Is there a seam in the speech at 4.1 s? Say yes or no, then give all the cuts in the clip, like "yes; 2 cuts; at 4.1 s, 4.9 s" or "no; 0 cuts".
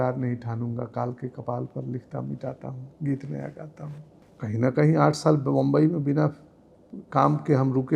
no; 0 cuts